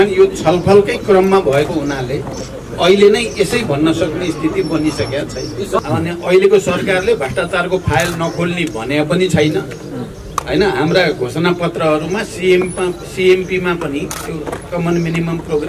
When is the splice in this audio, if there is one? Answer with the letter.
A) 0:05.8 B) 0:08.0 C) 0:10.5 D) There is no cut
A